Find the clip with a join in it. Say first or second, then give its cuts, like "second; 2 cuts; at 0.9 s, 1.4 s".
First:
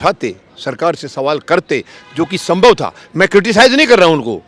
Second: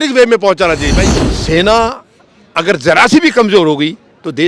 second; 1 cut; at 1.0 s